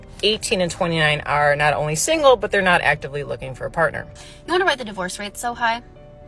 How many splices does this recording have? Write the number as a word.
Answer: one